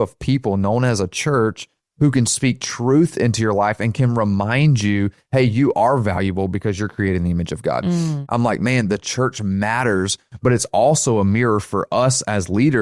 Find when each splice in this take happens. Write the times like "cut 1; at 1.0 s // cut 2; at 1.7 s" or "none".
cut 1; at 1.8 s // cut 2; at 8.2 s